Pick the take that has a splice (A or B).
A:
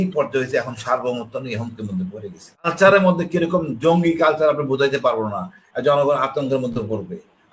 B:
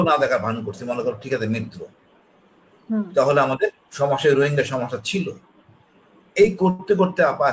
A